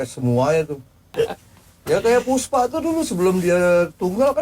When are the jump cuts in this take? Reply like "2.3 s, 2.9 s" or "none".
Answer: 1.0 s